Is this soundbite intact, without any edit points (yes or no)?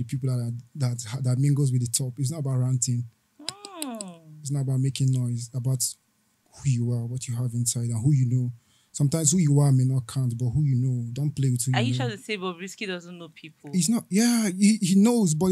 yes